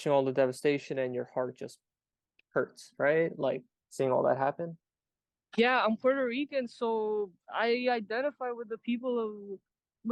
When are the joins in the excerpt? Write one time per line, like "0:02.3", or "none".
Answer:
none